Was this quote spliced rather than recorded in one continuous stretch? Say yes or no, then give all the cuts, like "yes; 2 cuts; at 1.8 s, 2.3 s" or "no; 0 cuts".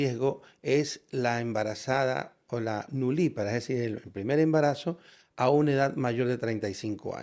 no; 0 cuts